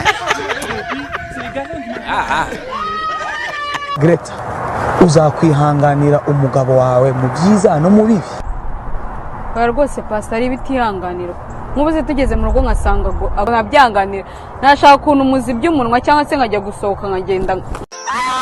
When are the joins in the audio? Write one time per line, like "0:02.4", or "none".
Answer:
0:13.5